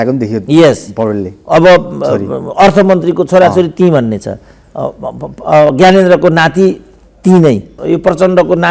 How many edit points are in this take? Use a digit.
1